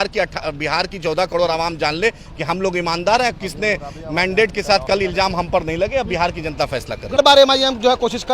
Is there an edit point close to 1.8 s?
no; 1 cut; at 7.2 s

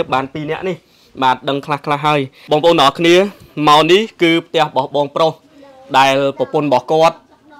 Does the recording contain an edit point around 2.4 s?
yes; 1 cut; at 2.4 s

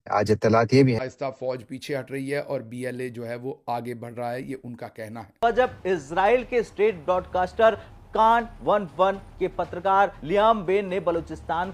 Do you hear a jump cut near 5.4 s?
yes; 2 cuts; at 1.0 s, 5.4 s

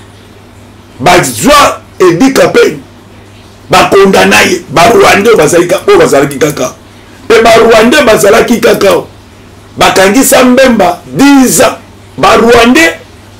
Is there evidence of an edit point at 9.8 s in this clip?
no; 1 cut; at 12.2 s

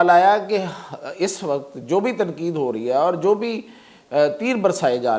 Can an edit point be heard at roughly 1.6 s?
no; 0 cuts

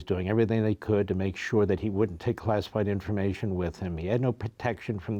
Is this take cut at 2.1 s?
no; 0 cuts

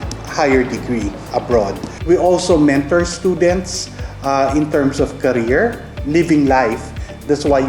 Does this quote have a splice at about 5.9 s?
yes; 2 cuts; at 1.9 s, 5.9 s

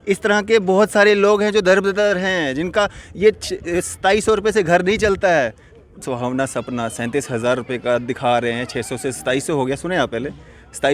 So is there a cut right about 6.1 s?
yes; 1 cut; at 6.1 s

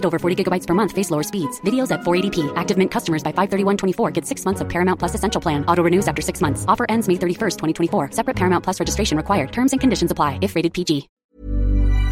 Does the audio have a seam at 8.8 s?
no; 1 cut; at 11.2 s

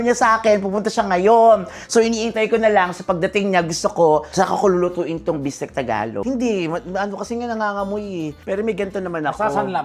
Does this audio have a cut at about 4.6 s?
no; 1 cut; at 6.2 s

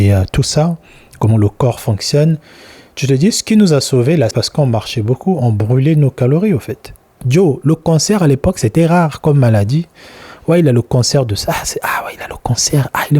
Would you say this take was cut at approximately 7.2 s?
yes; 2 cuts; at 4.4 s, 7.2 s

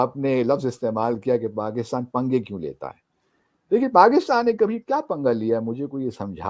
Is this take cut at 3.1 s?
no; 0 cuts

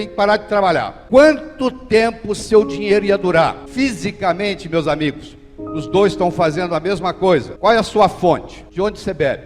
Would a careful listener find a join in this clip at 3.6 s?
yes; 3 cuts; at 1.0 s, 3.6 s, 7.5 s

